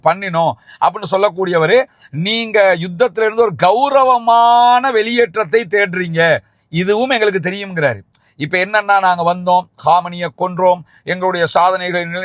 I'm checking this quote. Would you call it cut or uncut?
uncut